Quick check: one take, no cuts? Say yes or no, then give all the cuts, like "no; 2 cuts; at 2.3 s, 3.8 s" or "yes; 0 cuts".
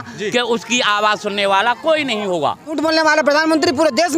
no; 1 cut; at 2.8 s